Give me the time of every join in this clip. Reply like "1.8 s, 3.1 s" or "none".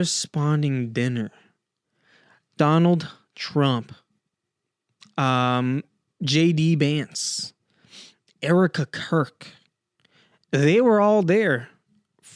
none